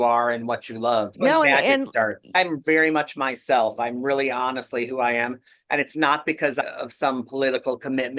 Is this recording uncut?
no; 2 cuts; at 1.2 s, 2.4 s

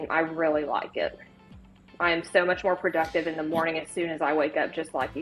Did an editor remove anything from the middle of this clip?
no; 0 cuts

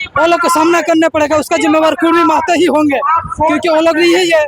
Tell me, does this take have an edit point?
no; 0 cuts

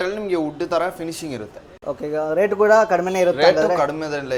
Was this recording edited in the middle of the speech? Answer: no; 0 cuts

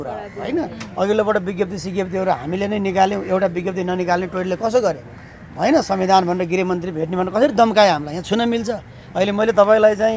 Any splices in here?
no; 0 cuts

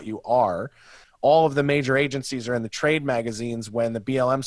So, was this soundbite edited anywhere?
yes; 1 cut; at 1.0 s

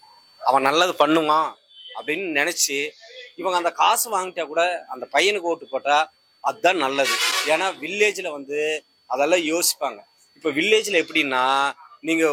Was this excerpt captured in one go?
yes; 0 cuts

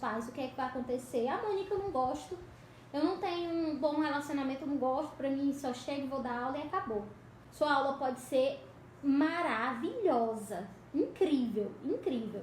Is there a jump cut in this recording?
yes; 1 cut; at 7.4 s

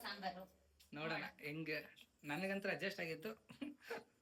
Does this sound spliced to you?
no; 0 cuts

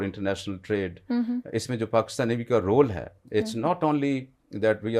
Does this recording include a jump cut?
no; 0 cuts

